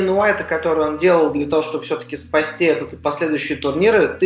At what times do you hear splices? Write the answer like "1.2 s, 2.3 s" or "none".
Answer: none